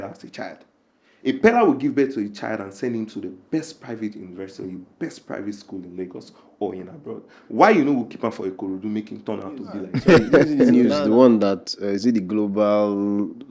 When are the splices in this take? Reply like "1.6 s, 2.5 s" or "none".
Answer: 10.5 s